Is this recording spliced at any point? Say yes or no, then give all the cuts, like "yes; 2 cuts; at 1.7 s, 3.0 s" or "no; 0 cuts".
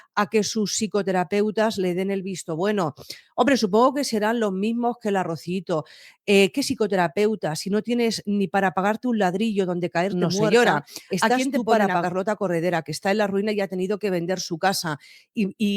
no; 0 cuts